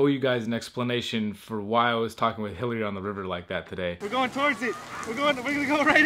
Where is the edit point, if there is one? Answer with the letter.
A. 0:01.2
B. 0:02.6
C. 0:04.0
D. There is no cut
C